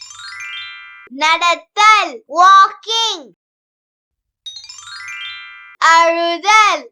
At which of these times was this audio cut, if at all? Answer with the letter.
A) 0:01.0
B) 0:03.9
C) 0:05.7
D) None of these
A